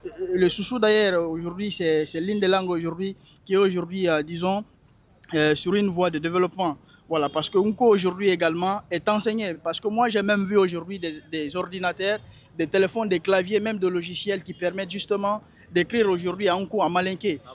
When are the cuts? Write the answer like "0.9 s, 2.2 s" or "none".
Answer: none